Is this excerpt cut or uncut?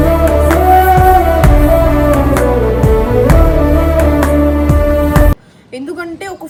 uncut